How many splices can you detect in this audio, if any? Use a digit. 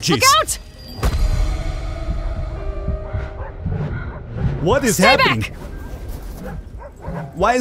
0